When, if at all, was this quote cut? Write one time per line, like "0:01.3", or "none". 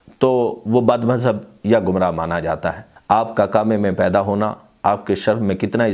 0:02.9